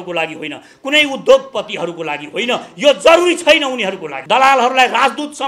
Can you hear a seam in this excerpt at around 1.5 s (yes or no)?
no